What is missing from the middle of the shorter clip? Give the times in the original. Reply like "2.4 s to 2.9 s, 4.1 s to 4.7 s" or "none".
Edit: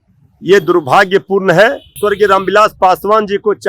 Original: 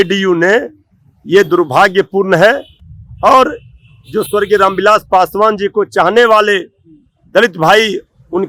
2.8 s to 4.2 s